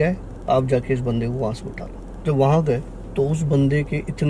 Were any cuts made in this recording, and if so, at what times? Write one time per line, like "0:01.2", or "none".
0:03.0